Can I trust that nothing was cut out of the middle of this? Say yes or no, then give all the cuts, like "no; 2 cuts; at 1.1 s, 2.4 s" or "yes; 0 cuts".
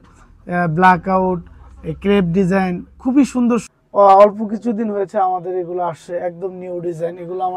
no; 1 cut; at 3.7 s